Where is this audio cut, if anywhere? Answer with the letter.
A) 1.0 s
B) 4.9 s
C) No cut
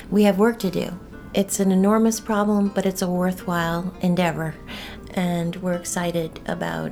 A